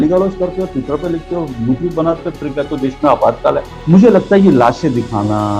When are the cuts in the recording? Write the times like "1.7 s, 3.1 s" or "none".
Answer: 3.7 s